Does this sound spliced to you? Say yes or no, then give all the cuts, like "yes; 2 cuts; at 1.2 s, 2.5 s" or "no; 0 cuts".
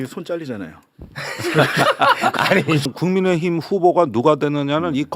yes; 1 cut; at 2.8 s